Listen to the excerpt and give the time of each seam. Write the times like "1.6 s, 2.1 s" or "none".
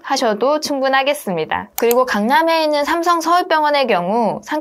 1.7 s